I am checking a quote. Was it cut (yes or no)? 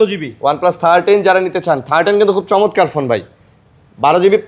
no